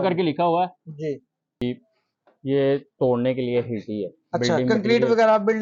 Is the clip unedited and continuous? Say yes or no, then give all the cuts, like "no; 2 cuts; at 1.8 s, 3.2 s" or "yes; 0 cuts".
no; 1 cut; at 1.6 s